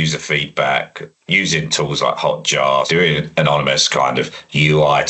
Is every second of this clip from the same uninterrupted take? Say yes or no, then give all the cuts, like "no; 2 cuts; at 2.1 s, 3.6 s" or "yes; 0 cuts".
no; 1 cut; at 2.9 s